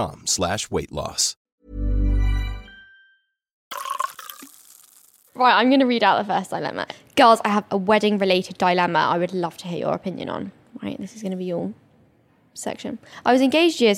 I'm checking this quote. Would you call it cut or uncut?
uncut